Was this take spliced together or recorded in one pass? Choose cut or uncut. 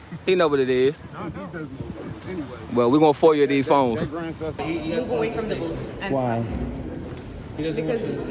cut